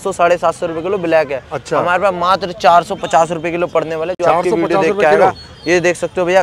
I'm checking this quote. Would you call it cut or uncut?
uncut